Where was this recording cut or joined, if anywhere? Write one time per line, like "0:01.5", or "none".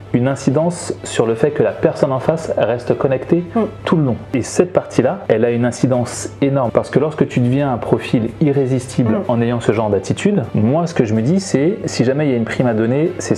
0:04.3
0:06.7